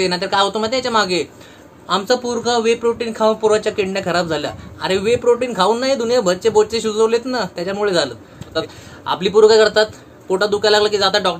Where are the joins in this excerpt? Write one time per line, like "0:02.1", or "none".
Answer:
0:08.5